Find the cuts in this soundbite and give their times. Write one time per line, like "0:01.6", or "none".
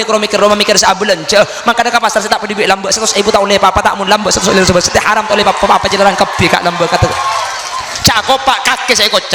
none